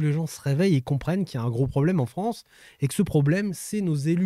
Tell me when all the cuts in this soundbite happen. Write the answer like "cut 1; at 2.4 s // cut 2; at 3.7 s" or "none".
none